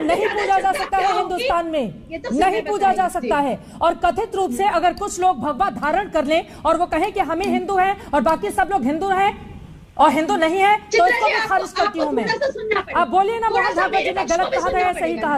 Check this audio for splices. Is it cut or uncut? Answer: uncut